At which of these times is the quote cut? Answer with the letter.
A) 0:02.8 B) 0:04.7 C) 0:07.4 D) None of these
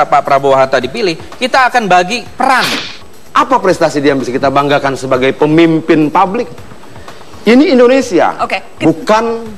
A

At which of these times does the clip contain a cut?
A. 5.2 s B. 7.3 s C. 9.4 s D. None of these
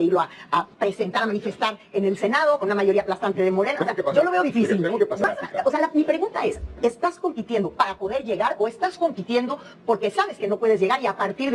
A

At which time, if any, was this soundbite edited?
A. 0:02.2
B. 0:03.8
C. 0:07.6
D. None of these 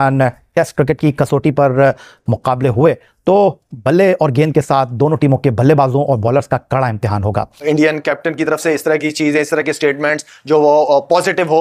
C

